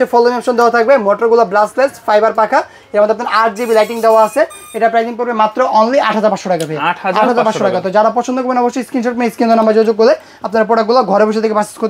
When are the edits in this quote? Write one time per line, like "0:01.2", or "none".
none

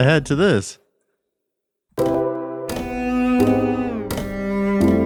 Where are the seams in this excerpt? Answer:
none

